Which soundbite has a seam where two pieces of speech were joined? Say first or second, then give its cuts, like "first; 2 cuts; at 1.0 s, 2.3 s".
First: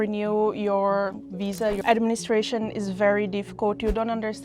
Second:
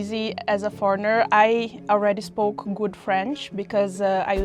first; 1 cut; at 1.8 s